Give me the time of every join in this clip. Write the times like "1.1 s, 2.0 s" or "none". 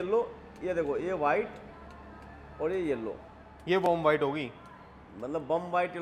none